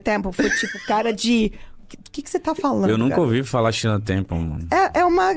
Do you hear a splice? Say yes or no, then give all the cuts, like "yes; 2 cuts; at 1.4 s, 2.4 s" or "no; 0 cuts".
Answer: no; 0 cuts